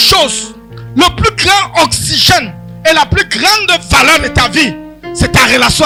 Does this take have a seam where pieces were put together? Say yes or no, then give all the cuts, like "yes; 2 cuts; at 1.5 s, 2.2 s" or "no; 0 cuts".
no; 0 cuts